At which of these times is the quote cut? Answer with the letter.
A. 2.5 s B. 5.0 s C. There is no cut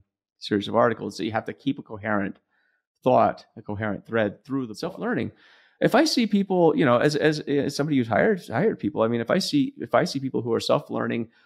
B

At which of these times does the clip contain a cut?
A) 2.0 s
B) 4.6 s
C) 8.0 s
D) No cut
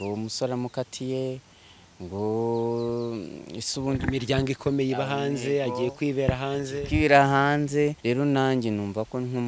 C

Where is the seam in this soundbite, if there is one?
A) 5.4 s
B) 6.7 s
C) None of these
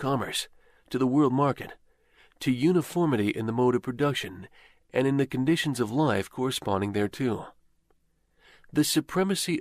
A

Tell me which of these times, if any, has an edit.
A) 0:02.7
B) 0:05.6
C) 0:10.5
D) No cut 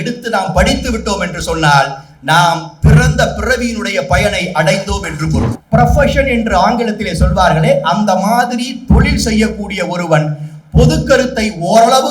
B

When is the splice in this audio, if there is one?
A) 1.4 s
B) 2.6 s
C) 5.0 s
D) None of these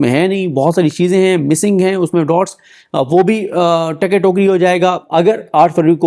C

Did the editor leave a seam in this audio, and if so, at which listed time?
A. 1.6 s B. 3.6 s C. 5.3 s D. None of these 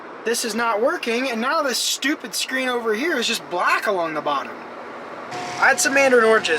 C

